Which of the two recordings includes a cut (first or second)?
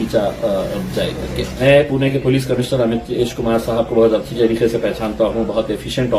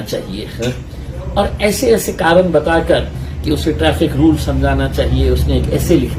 first